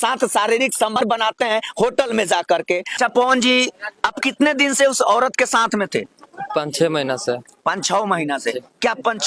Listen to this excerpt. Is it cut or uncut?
cut